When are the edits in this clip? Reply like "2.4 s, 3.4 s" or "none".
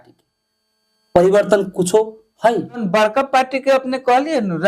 2.8 s

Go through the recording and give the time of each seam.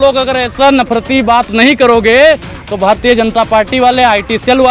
none

